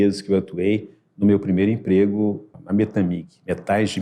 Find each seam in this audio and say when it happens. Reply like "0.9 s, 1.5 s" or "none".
2.5 s